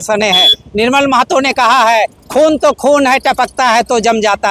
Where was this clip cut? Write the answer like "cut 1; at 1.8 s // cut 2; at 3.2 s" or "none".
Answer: none

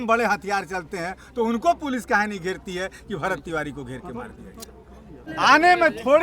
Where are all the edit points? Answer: cut 1; at 5.2 s

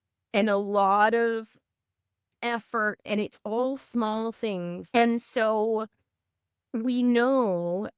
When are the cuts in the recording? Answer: cut 1; at 3.0 s // cut 2; at 4.8 s

